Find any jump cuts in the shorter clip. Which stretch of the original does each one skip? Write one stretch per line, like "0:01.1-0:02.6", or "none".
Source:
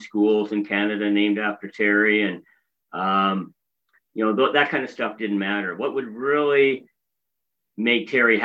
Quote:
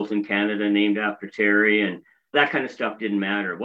0:02.7-0:04.5